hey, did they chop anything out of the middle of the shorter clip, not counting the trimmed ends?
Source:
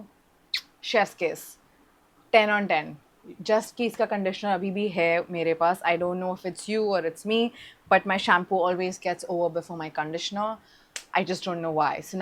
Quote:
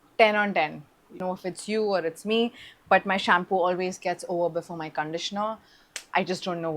yes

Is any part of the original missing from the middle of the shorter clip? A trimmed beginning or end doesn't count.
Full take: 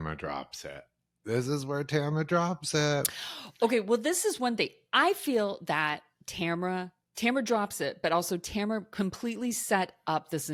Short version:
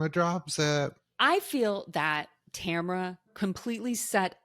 yes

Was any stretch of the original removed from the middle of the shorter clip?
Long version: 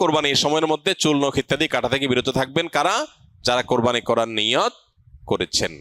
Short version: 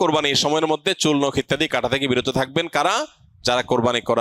no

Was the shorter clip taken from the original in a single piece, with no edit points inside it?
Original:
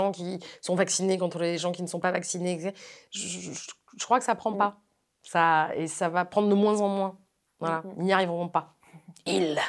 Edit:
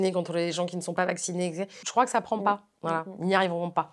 no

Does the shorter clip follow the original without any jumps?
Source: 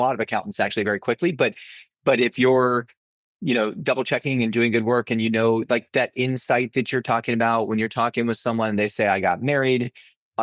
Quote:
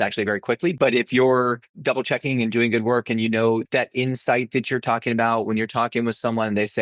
no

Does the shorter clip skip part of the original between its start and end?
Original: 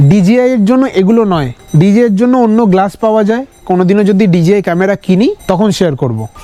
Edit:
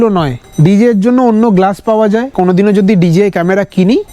yes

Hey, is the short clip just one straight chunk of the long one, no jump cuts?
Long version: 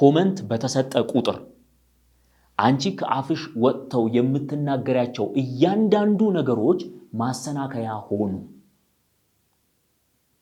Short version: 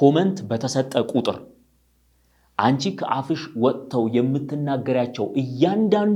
yes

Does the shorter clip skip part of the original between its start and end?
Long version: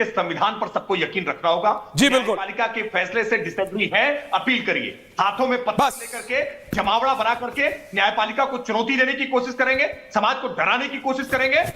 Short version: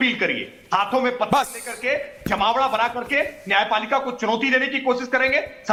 no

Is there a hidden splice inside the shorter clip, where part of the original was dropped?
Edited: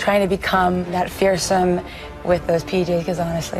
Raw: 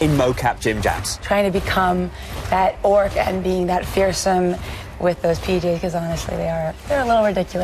yes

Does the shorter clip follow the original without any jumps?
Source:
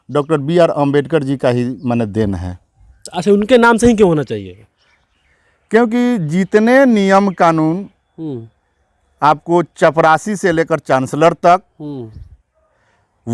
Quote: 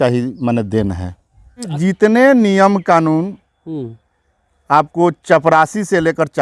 no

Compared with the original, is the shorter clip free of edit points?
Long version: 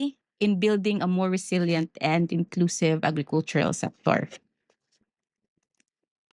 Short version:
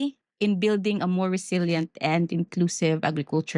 yes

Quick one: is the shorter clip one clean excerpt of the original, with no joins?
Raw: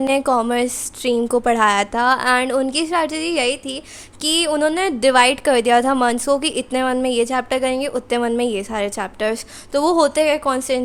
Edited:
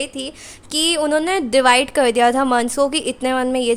yes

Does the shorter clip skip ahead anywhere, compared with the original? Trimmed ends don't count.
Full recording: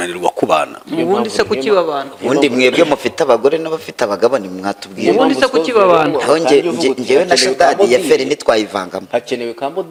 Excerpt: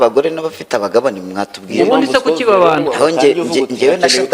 no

